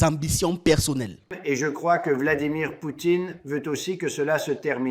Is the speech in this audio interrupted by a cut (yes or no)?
yes